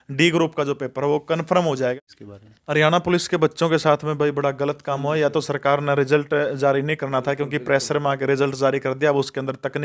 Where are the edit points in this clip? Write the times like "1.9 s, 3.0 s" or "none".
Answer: 2.0 s